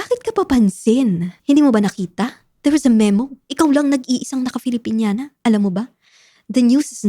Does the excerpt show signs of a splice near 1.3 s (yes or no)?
yes